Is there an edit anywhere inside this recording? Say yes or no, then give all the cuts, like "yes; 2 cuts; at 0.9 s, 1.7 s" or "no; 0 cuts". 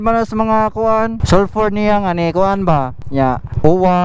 yes; 2 cuts; at 1.2 s, 3.1 s